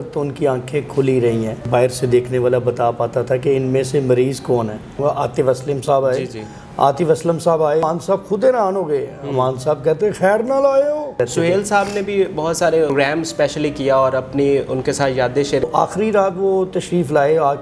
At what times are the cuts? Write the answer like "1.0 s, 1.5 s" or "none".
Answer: 1.6 s, 5.0 s, 7.8 s, 11.2 s, 12.9 s, 15.7 s